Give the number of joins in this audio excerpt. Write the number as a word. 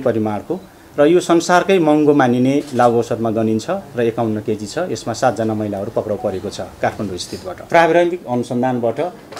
one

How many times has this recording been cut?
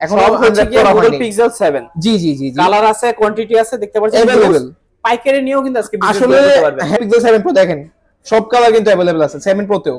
one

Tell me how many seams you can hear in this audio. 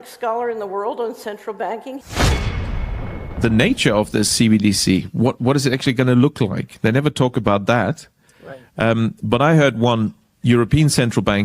one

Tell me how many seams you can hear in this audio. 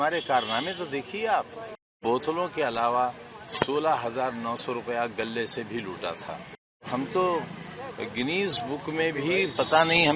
two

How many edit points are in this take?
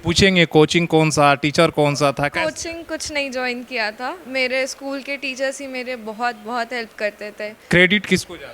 two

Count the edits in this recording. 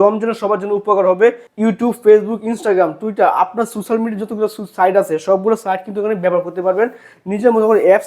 one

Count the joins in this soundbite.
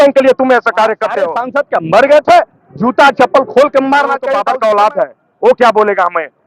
two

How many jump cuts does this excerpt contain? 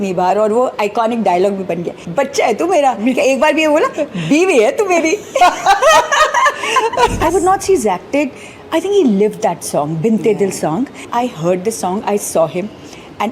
three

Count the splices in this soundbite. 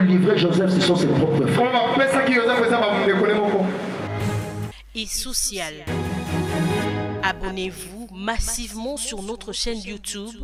zero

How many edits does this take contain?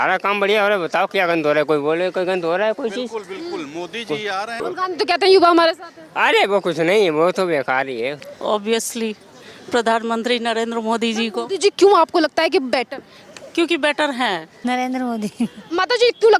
three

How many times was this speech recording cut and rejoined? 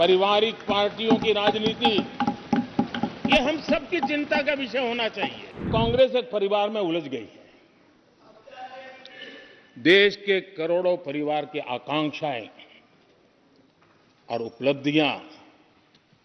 one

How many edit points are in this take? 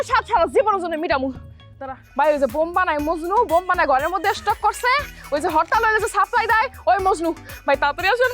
one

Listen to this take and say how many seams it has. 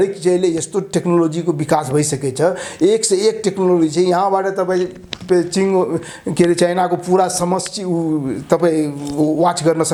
zero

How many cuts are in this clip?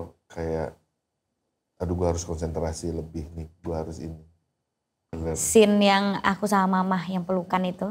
one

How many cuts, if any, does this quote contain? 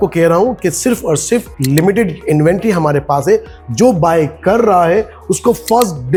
zero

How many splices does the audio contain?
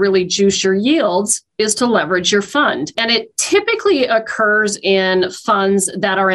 one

